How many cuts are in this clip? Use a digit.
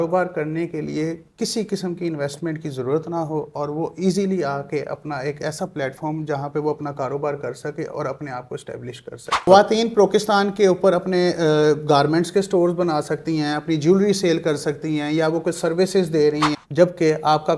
2